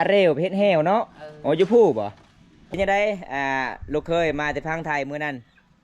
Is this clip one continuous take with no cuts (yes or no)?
no